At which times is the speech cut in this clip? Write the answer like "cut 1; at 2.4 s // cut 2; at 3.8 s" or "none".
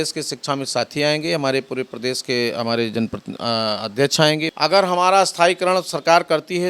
cut 1; at 4.5 s